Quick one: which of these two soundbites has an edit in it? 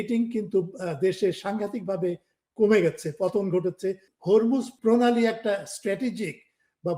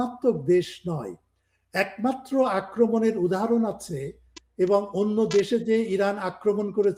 first; 2 cuts; at 4.1 s, 4.7 s

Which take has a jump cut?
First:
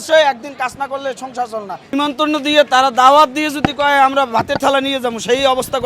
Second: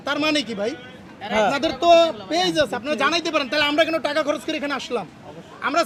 first; 1 cut; at 1.8 s

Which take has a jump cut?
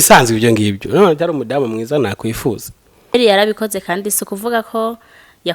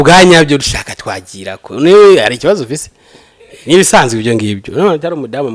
first; 1 cut; at 3.1 s

